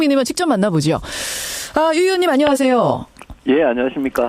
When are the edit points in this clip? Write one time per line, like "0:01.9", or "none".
0:03.2